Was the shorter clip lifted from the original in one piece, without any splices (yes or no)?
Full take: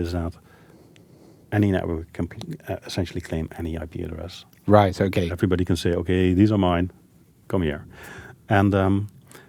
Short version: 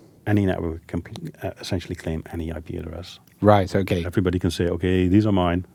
yes